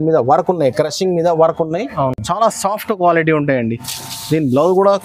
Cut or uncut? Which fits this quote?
uncut